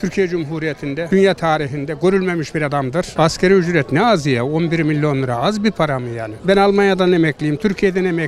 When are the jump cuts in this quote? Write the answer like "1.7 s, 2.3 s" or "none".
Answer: 3.1 s, 6.3 s